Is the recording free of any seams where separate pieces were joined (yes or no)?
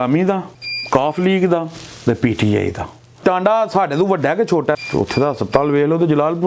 no